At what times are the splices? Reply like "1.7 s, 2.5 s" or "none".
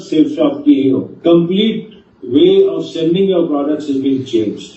1.1 s